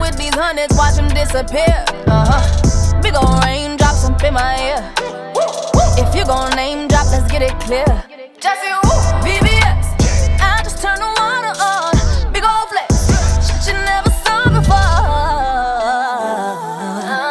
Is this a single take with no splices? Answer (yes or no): yes